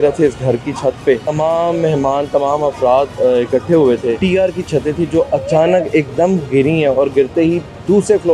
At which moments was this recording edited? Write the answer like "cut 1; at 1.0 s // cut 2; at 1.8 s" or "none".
cut 1; at 1.3 s // cut 2; at 4.2 s